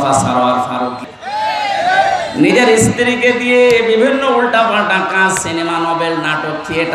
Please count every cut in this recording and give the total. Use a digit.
1